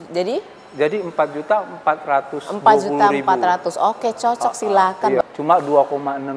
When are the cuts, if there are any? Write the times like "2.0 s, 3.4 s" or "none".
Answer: 5.2 s

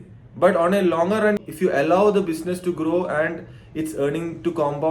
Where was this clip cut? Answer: 1.4 s

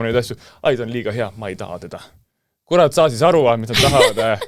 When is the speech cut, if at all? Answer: none

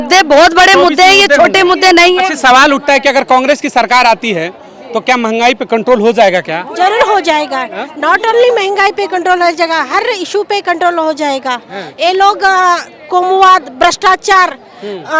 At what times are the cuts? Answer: none

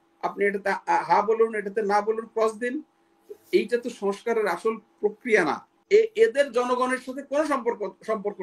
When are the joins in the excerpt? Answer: 5.7 s

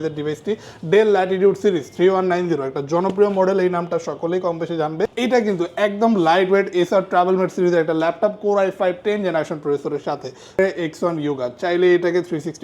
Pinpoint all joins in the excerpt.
5.1 s, 10.6 s

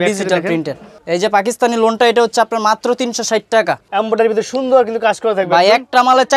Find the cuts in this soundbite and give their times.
0.9 s, 3.8 s

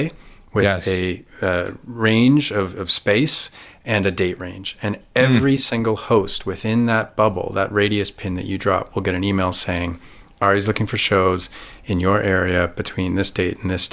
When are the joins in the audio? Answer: none

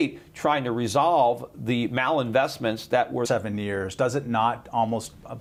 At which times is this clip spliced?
none

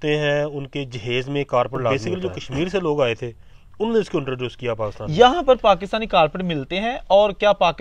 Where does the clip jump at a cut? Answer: 2.0 s, 5.0 s

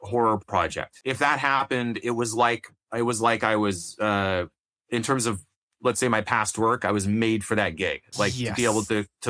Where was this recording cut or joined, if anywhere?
1.0 s

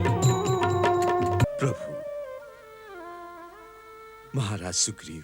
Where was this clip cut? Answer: 1.5 s

